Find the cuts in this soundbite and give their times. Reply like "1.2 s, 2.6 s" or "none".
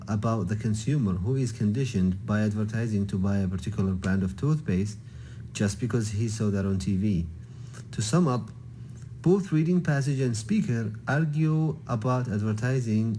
none